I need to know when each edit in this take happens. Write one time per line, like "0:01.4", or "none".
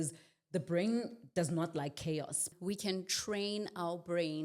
0:02.5